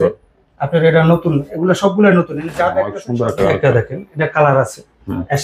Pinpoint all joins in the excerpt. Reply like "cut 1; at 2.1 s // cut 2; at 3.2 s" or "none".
cut 1; at 3.0 s